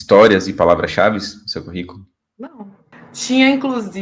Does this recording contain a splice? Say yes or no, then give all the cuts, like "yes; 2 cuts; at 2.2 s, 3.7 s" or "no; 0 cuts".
yes; 2 cuts; at 2.2 s, 2.9 s